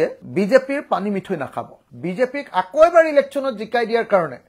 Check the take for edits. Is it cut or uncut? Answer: cut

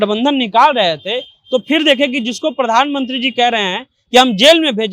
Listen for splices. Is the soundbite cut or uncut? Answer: uncut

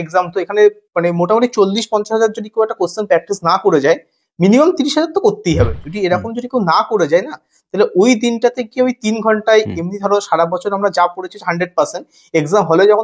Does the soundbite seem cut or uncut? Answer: uncut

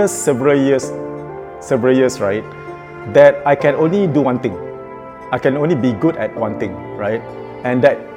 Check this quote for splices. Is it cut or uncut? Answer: uncut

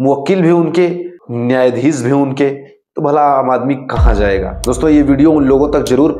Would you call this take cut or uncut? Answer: uncut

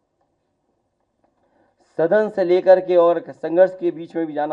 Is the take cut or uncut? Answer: uncut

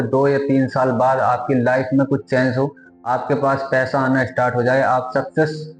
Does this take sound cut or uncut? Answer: uncut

